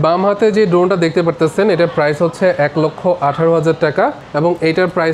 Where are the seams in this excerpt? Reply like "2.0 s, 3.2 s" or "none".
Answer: 4.2 s